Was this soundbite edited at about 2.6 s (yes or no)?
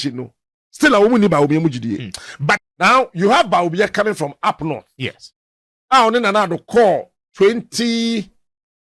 yes